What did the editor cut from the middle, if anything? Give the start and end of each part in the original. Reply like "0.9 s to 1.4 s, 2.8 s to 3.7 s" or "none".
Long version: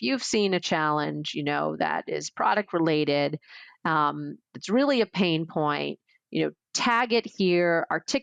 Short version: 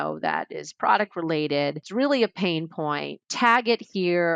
3.4 s to 4.6 s, 6.0 s to 6.7 s